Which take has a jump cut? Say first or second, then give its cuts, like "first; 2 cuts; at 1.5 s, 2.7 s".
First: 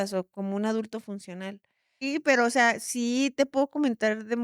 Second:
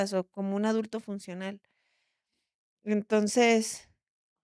first; 1 cut; at 2.1 s